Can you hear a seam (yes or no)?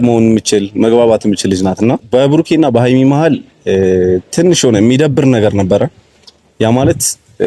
yes